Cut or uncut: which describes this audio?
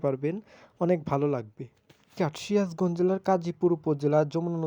cut